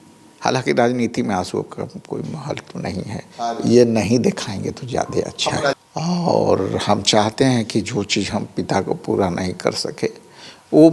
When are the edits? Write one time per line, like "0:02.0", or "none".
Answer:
0:05.8